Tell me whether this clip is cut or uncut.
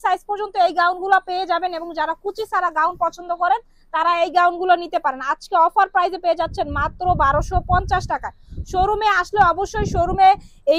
uncut